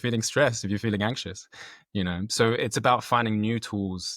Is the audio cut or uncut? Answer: uncut